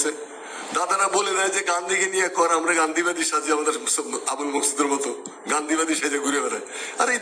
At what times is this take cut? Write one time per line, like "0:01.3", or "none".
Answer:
none